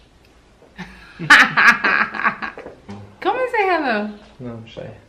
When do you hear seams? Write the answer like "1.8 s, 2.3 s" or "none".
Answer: 3.0 s